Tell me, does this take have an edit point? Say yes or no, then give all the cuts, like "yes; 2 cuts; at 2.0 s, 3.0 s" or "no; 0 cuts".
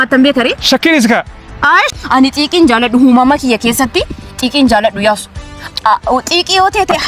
yes; 1 cut; at 1.9 s